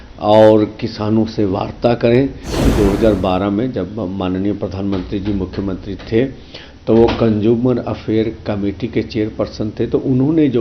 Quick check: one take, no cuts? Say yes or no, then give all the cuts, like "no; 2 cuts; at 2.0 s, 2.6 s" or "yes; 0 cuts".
no; 1 cut; at 2.7 s